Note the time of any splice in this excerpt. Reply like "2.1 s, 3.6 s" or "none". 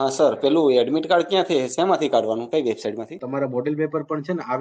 3.2 s